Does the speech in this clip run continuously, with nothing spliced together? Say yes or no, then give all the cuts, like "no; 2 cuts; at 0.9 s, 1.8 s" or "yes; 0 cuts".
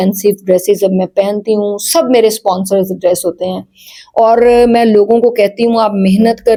yes; 0 cuts